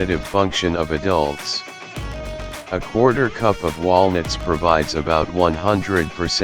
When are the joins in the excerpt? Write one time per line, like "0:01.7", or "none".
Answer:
0:01.4
0:02.7